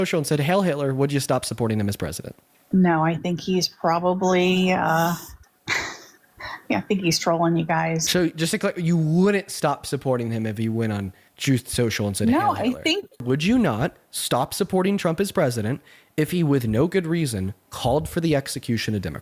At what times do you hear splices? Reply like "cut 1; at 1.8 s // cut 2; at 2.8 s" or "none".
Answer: cut 1; at 8.0 s // cut 2; at 13.2 s